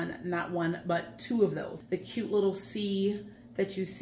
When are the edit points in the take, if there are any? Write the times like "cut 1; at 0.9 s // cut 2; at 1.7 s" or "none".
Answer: cut 1; at 1.7 s